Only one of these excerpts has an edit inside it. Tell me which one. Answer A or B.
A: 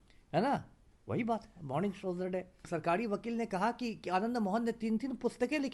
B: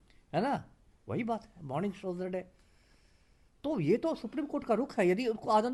A